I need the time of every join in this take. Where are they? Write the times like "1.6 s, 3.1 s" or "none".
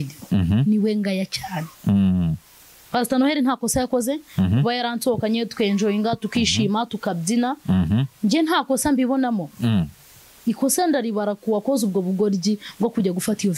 none